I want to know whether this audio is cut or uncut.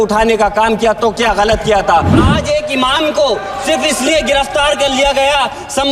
cut